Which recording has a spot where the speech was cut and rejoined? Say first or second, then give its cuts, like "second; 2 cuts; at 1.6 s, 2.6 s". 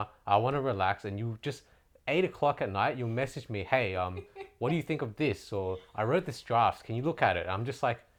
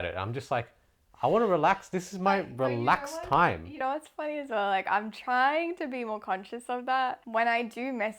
second; 1 cut; at 7.2 s